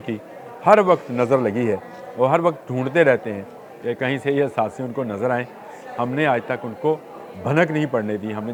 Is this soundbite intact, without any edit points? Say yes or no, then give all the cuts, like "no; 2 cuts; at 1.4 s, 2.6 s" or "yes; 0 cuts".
yes; 0 cuts